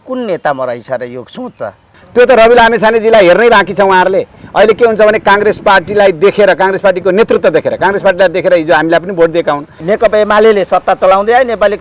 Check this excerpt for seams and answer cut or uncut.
cut